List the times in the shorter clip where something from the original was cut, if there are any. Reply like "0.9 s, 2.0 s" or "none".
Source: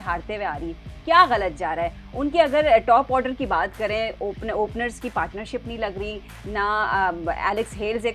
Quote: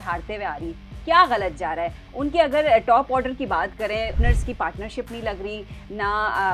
4.2 s